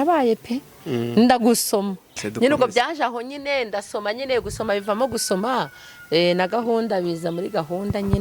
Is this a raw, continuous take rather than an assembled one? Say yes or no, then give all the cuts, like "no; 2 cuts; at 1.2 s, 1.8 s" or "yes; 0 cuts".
no; 1 cut; at 2.2 s